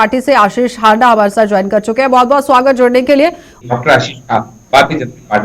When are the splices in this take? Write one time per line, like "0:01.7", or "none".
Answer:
0:03.6